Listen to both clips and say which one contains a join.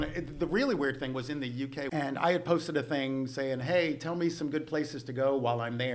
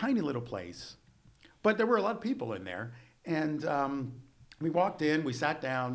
first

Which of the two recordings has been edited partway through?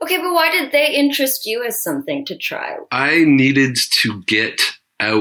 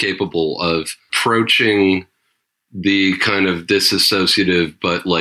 second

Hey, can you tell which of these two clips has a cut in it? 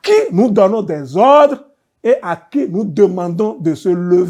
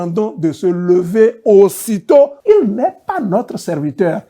second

